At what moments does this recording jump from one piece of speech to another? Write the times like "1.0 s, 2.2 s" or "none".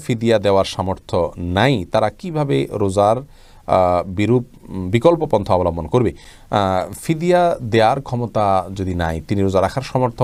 none